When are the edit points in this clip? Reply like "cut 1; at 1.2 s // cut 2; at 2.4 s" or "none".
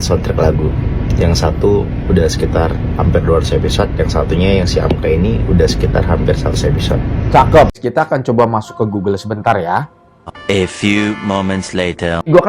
cut 1; at 7.8 s

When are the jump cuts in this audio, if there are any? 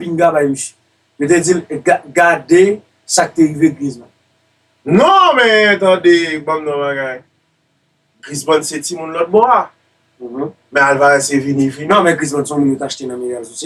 none

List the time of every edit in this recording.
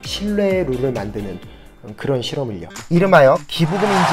cut 1; at 2.7 s

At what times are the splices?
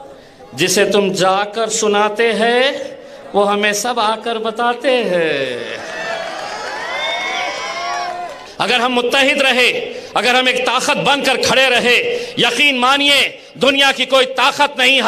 cut 1; at 8.4 s

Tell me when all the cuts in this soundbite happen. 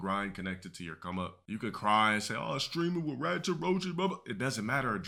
none

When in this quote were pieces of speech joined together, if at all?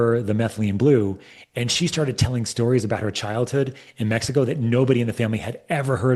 none

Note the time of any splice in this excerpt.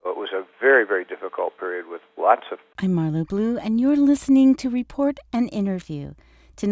none

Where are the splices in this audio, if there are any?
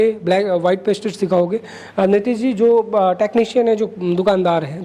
none

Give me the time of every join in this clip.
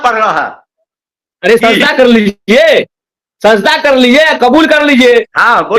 none

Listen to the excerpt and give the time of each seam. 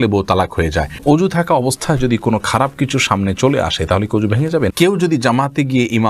cut 1; at 1.2 s // cut 2; at 5.1 s

